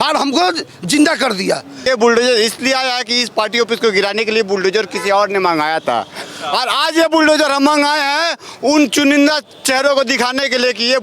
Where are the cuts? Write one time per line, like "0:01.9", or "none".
0:01.8